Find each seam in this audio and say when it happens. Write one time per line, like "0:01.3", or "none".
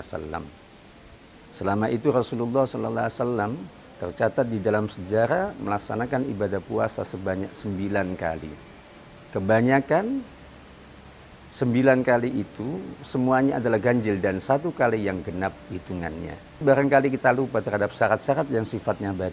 0:16.6